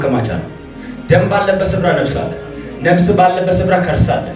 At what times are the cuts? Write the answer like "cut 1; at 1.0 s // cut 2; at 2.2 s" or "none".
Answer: none